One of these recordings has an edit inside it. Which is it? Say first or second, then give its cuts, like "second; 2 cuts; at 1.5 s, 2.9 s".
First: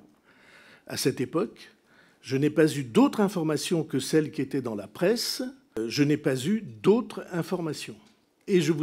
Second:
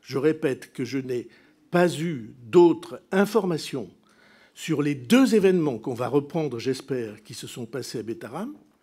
first; 1 cut; at 5.8 s